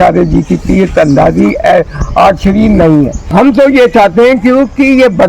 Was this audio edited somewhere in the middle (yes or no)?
yes